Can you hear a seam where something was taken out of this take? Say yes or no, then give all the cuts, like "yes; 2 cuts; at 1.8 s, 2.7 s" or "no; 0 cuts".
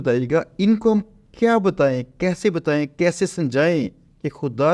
no; 0 cuts